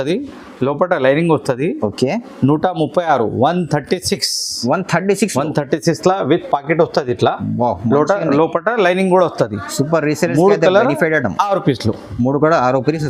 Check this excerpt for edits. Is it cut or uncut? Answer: uncut